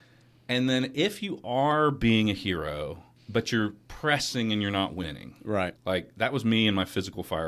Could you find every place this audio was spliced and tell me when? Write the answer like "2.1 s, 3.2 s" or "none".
3.1 s, 5.8 s